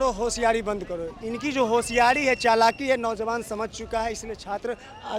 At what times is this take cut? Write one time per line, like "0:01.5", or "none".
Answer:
none